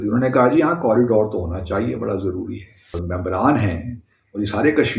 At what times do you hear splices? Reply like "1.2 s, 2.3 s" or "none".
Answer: 3.0 s